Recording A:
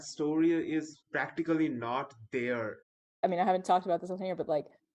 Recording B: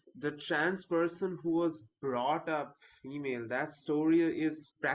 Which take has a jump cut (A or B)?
A